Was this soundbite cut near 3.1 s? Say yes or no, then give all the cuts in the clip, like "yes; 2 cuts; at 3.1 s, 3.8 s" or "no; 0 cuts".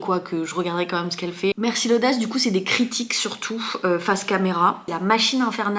no; 2 cuts; at 1.6 s, 4.8 s